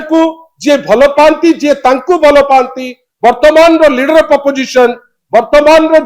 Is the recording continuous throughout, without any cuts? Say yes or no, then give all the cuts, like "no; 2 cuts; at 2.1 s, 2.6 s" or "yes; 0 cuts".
yes; 0 cuts